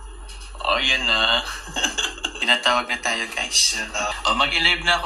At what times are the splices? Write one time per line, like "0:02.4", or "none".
0:02.3
0:04.2

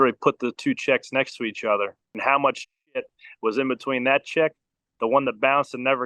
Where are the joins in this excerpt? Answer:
0:02.2

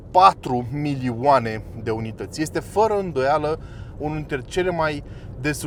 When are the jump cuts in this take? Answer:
none

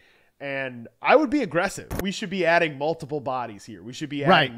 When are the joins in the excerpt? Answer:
0:01.9

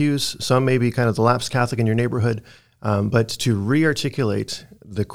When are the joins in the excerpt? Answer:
none

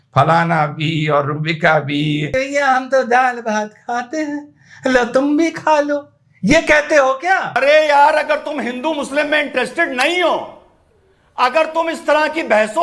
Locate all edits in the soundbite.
0:02.3
0:07.5

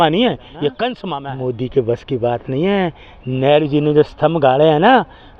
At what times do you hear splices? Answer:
0:01.1

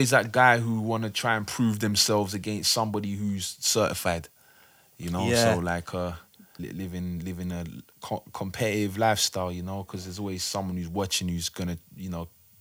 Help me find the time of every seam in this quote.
0:06.5

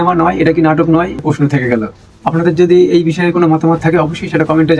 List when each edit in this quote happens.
0:01.2

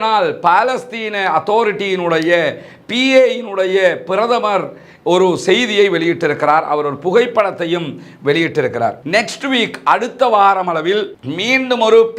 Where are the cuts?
0:09.0

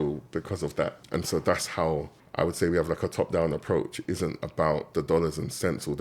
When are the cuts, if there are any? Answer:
0:01.1
0:02.2
0:04.9

